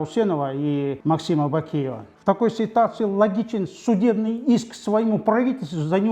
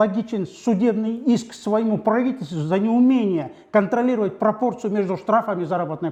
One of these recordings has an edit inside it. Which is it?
first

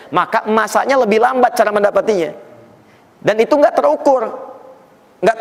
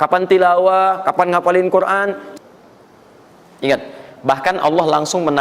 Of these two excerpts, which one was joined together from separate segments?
second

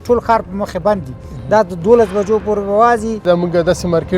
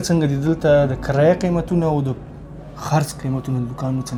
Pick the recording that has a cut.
first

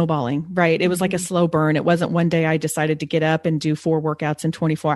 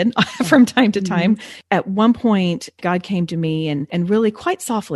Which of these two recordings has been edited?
second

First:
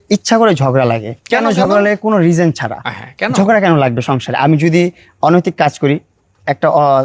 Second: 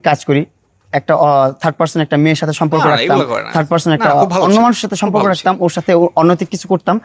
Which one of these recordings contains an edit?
first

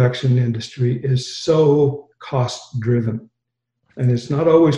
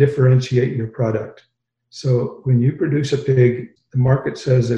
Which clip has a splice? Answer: second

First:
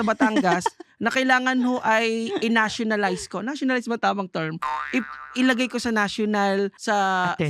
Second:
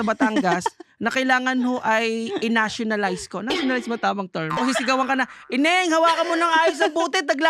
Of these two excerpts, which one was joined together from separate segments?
second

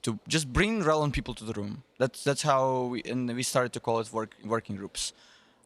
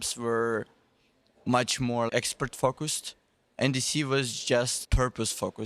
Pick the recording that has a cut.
second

